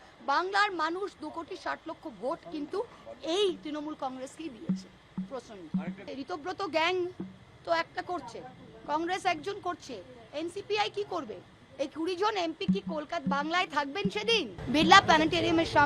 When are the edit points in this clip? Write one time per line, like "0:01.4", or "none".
0:06.1
0:14.6